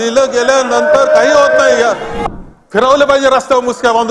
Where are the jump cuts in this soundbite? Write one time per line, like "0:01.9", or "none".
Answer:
0:02.1